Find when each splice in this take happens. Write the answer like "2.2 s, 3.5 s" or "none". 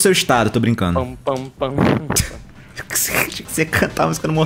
none

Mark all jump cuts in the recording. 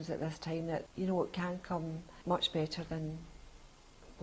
0.9 s, 2.1 s

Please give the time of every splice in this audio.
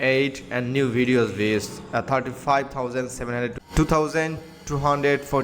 3.6 s

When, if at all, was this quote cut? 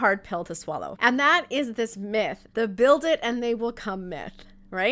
0.9 s, 2.4 s

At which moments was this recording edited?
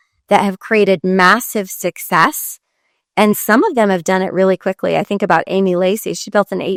none

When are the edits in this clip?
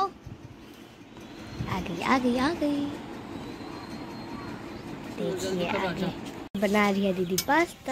6.3 s

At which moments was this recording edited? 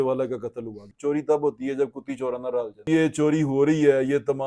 0.9 s, 2.9 s

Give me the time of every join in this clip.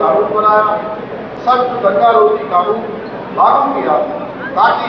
none

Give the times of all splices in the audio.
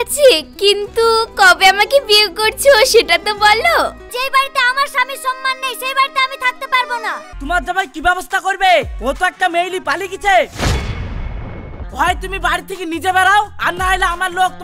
4.1 s, 7.3 s, 11.9 s

